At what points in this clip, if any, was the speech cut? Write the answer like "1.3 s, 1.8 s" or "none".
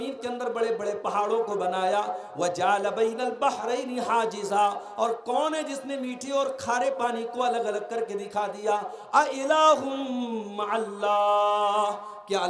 none